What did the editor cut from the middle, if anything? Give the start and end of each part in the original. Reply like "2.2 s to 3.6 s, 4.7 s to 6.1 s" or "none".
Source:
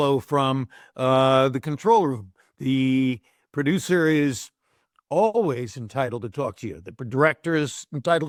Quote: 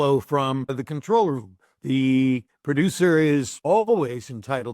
0.8 s to 1.6 s, 3.3 s to 3.4 s, 4.4 s to 5.0 s